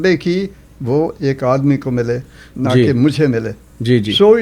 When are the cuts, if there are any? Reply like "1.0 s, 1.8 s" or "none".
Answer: none